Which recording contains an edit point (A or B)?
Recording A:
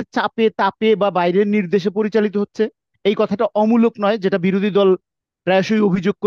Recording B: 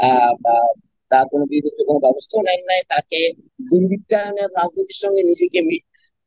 B